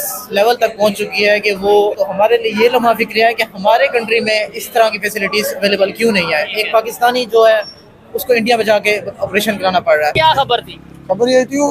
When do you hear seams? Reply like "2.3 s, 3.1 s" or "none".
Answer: 2.0 s, 10.1 s